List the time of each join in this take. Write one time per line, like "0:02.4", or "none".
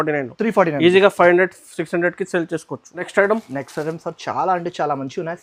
none